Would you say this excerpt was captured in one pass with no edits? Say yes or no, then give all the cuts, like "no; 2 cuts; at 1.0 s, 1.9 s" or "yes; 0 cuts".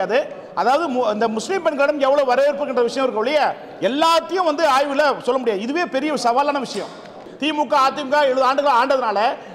no; 1 cut; at 7.3 s